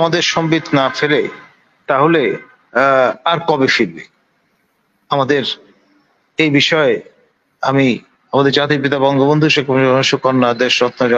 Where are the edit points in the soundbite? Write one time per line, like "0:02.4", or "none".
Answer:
none